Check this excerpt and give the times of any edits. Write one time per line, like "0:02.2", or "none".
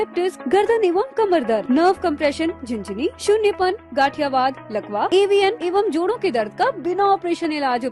none

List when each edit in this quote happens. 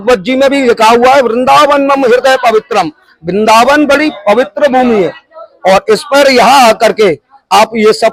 none

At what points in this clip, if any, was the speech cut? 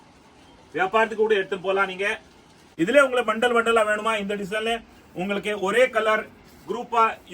0:02.7

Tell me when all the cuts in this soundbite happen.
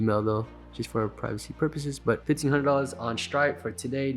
0:02.2

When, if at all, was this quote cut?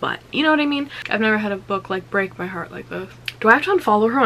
0:01.0
0:03.2

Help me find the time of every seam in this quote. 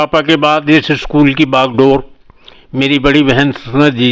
none

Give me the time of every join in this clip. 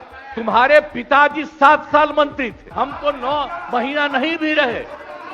0:02.6

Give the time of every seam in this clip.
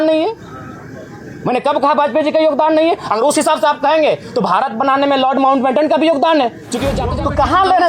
0:07.0

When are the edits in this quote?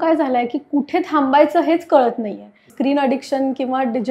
0:02.7

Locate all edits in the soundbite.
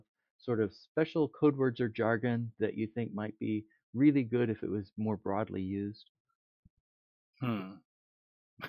none

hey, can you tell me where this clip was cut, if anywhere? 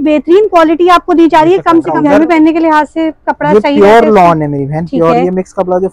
0:01.9

